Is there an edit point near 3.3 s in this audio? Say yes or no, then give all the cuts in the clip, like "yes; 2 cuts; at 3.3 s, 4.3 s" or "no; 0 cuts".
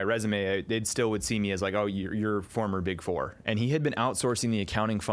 yes; 1 cut; at 3.3 s